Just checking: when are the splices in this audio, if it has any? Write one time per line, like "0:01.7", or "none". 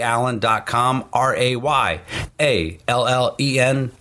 none